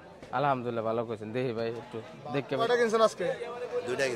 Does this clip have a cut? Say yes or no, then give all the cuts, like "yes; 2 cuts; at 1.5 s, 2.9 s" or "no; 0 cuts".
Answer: yes; 1 cut; at 2.7 s